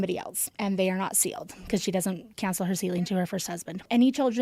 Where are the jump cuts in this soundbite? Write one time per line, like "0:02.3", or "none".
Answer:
none